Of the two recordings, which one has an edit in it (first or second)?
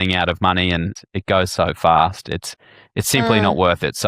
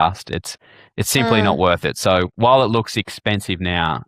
first